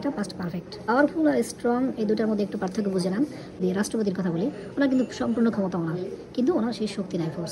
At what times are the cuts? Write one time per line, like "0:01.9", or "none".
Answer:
0:00.8
0:03.6